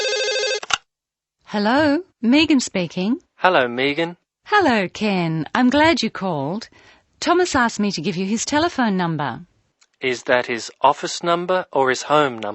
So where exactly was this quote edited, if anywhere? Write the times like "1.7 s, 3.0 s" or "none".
0.9 s